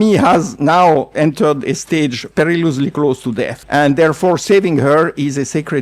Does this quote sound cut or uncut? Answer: cut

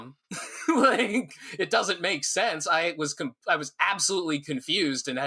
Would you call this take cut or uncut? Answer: cut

